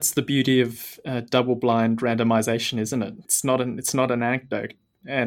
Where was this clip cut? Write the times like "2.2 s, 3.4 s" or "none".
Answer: 3.2 s